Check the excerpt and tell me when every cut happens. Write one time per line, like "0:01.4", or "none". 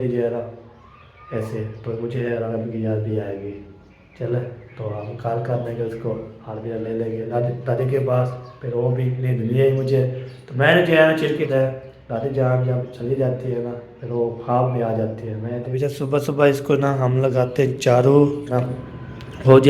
0:02.5
0:07.3
0:11.5
0:15.6
0:18.7